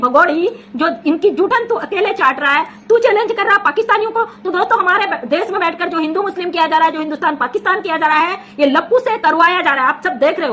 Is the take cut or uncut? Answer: uncut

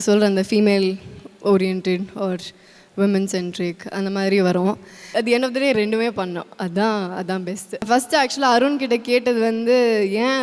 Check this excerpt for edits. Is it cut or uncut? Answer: cut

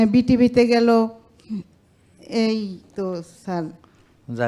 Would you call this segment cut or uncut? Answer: uncut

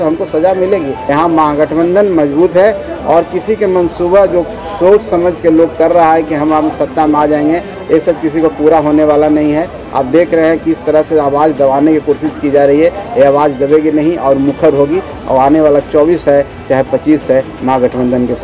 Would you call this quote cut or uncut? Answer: cut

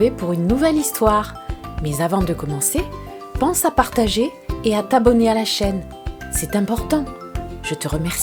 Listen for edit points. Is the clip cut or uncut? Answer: uncut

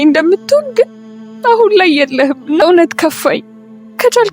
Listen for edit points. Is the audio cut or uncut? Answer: cut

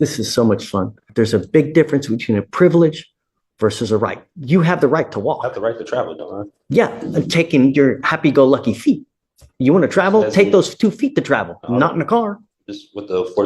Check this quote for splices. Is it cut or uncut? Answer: cut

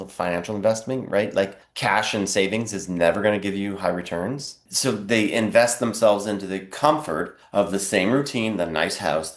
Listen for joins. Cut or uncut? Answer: cut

